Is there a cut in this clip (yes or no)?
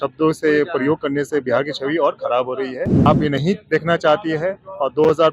yes